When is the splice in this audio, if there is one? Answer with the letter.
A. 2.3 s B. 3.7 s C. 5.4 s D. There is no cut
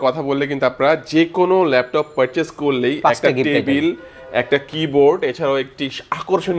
D